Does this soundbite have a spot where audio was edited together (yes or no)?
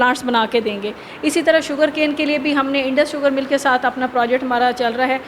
no